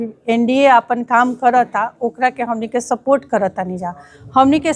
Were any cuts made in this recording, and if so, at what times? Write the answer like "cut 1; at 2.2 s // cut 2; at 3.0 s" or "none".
none